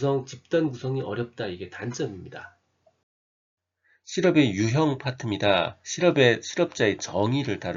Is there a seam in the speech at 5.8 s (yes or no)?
no